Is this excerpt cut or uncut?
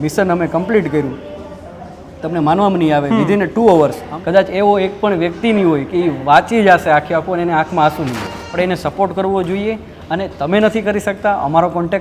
cut